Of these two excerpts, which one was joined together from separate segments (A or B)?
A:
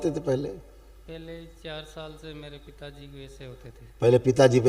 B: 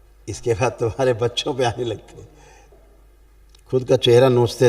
B